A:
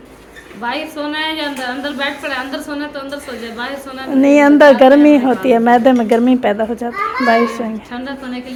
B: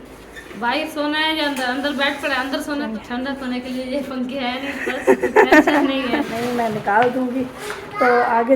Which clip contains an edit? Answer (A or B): B